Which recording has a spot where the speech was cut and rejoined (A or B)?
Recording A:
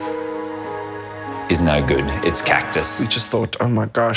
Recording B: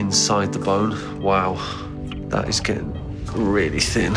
A